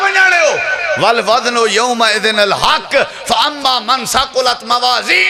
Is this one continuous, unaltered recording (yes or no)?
yes